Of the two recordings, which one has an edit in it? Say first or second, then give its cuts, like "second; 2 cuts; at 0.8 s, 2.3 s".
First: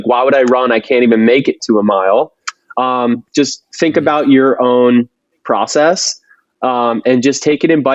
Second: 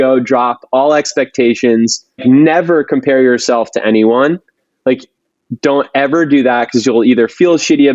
second; 1 cut; at 2.2 s